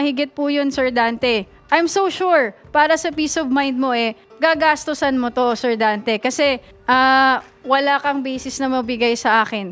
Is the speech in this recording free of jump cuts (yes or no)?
yes